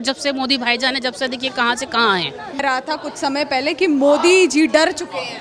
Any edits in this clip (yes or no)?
yes